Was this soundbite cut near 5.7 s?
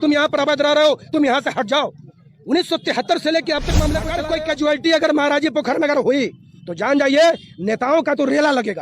no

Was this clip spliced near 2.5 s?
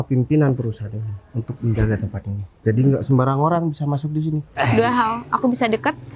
no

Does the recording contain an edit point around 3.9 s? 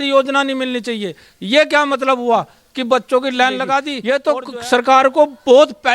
yes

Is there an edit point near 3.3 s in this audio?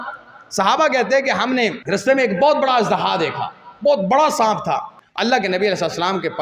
no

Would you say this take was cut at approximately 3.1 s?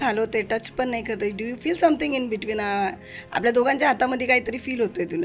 no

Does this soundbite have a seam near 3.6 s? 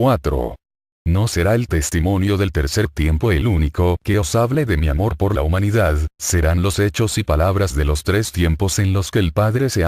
yes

